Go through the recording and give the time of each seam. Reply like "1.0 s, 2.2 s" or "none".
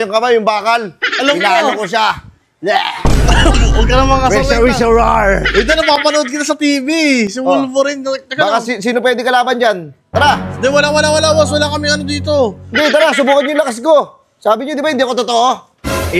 none